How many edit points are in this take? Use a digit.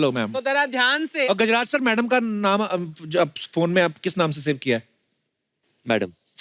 1